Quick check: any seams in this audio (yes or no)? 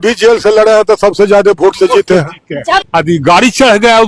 yes